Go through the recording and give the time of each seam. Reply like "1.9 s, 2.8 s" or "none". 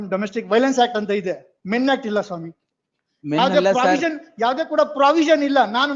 none